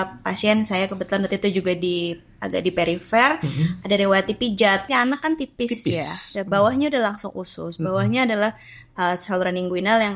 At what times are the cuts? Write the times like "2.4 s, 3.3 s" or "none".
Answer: 4.8 s